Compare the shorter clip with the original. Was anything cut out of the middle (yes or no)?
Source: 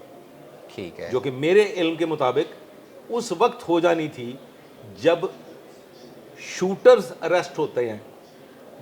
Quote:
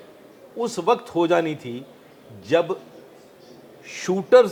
no